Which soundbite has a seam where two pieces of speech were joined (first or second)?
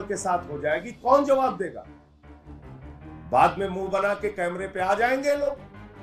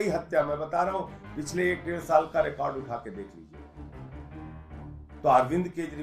second